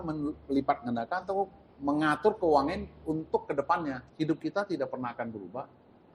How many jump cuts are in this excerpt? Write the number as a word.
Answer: one